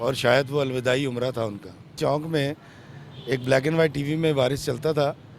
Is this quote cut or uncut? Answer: cut